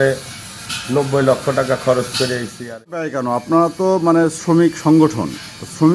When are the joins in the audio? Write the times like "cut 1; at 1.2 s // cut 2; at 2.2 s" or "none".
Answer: cut 1; at 3.1 s